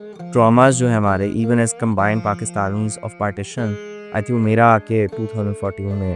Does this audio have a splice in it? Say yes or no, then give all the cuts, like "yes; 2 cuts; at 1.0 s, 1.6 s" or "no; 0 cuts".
no; 0 cuts